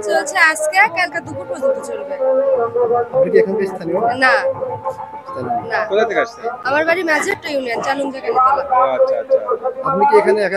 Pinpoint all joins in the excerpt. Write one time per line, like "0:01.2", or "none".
none